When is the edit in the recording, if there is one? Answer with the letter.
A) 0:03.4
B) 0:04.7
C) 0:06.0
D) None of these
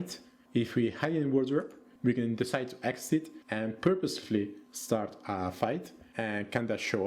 C